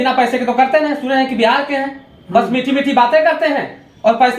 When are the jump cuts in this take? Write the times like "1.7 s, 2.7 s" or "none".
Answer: none